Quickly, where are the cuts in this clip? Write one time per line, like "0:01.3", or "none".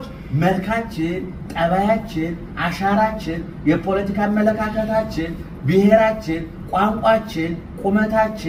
none